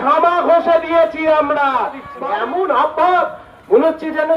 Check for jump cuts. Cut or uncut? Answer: cut